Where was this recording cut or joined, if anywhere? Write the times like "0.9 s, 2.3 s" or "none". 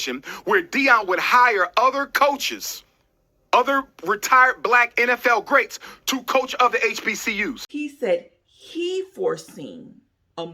7.6 s